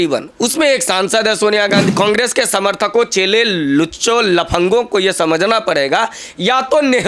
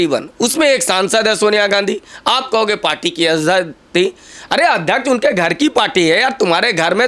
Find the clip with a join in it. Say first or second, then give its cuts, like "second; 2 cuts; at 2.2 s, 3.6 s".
first; 1 cut; at 1.9 s